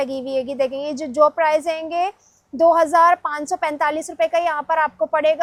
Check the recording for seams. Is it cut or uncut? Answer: uncut